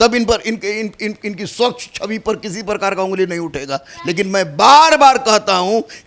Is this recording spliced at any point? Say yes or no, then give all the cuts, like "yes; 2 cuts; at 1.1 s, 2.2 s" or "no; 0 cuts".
no; 0 cuts